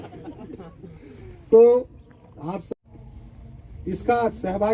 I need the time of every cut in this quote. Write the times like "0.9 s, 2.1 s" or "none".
2.7 s